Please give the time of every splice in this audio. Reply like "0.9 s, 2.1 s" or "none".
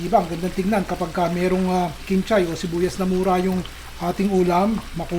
none